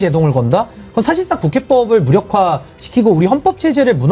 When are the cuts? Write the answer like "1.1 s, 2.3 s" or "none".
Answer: none